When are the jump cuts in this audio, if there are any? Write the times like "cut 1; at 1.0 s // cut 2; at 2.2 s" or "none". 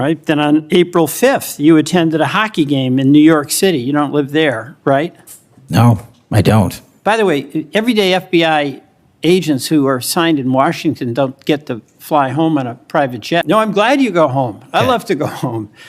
cut 1; at 13.4 s